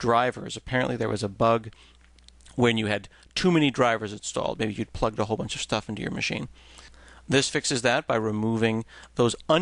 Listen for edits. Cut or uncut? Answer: uncut